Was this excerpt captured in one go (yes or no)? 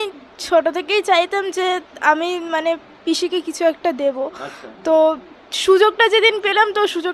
yes